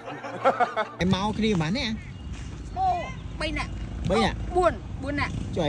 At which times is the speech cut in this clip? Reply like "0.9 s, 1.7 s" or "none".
0.9 s